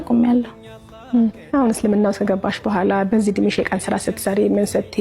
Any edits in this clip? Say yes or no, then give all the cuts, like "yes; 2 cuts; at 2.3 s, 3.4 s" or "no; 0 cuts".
no; 0 cuts